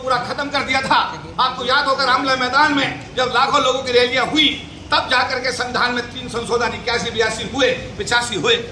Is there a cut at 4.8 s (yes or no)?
no